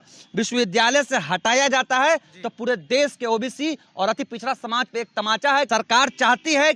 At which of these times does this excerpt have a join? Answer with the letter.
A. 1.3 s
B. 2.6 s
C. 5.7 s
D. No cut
C